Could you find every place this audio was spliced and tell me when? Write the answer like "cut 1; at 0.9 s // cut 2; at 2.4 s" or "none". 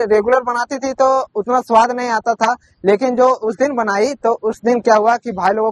none